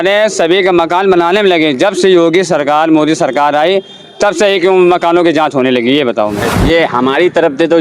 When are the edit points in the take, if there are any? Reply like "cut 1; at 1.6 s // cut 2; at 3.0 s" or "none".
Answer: cut 1; at 6.5 s

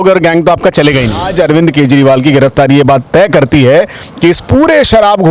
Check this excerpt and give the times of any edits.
cut 1; at 1.3 s

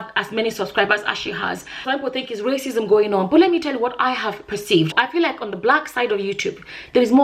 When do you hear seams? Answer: cut 1; at 1.7 s // cut 2; at 4.9 s

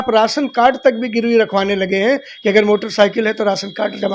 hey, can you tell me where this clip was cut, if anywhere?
none

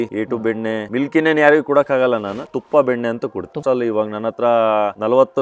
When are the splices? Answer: cut 1; at 2.5 s // cut 2; at 3.6 s

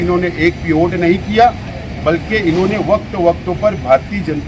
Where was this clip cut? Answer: none

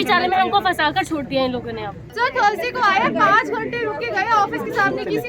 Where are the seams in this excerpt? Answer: cut 1; at 2.0 s

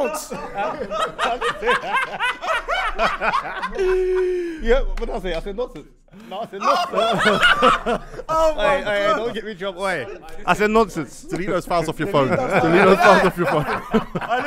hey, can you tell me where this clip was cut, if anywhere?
none

